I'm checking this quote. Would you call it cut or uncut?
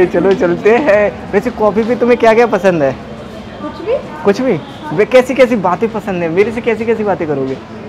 uncut